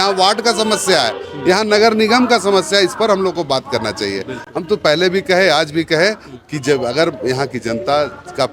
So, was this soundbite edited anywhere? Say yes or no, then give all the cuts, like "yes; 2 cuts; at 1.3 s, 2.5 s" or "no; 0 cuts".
no; 0 cuts